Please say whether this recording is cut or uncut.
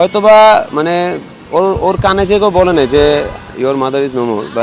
uncut